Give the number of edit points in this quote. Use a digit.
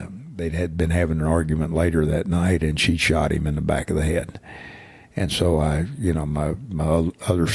0